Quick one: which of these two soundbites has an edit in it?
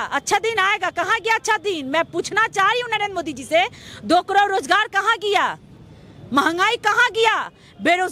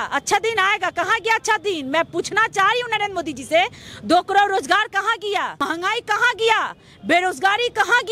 second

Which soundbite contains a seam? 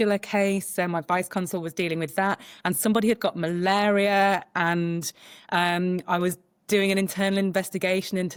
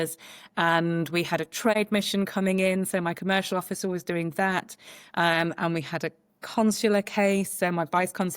second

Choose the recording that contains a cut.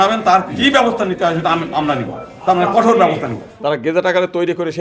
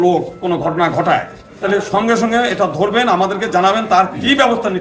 first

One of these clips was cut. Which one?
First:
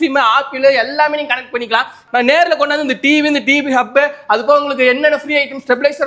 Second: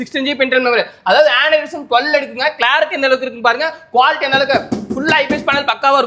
first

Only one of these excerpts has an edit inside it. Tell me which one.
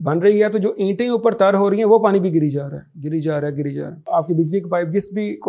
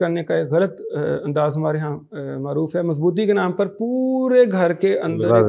first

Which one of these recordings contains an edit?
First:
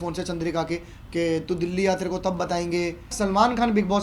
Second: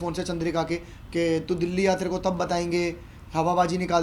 first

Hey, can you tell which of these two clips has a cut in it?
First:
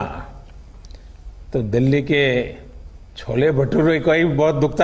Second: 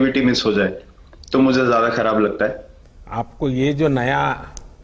second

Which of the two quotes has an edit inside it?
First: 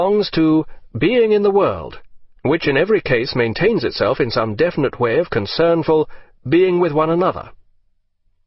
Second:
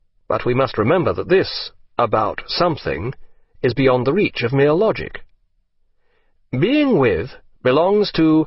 second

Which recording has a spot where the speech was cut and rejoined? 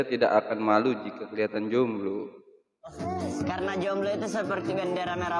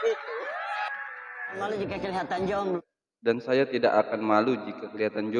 second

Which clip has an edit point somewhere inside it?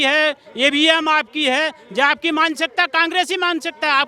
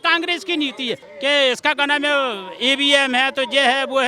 second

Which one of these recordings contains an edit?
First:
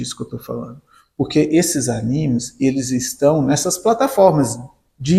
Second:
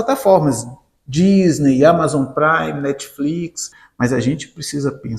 second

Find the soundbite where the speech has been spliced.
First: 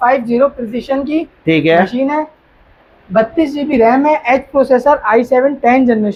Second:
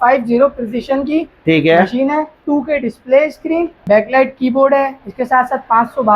second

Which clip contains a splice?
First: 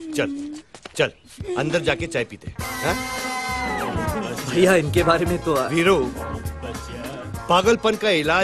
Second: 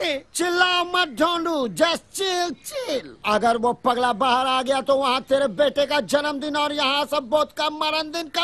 first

